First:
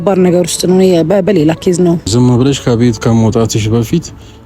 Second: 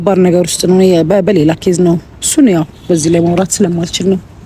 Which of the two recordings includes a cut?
first; 1 cut; at 2.1 s

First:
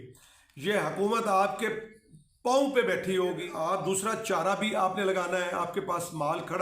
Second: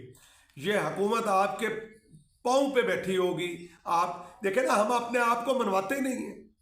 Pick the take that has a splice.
first; 1 cut; at 3.5 s

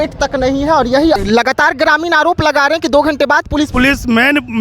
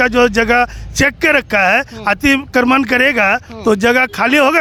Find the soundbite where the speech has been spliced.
first; 2 cuts; at 1.2 s, 3.7 s

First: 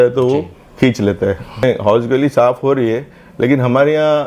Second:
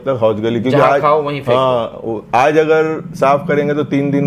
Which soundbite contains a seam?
first; 1 cut; at 1.6 s

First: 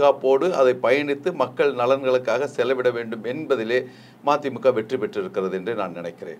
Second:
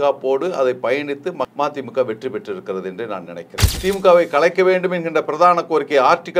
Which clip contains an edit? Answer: second; 2 cuts; at 1.5 s, 3.7 s

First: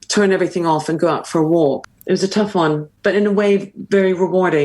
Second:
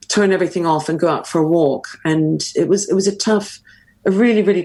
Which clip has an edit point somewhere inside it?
first; 2 cuts; at 1.9 s, 2.9 s

